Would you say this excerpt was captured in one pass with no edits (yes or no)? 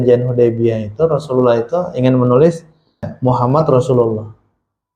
no